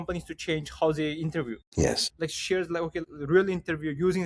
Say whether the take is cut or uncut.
cut